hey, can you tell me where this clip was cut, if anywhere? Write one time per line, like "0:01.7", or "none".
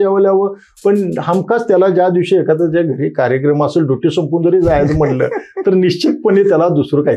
none